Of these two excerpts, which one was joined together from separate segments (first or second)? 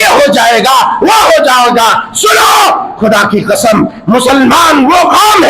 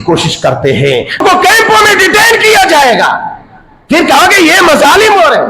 second